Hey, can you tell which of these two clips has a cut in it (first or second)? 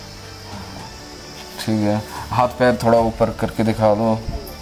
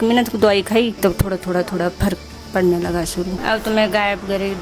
second